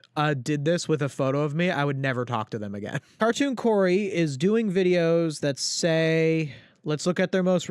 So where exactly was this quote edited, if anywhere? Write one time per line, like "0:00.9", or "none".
0:03.1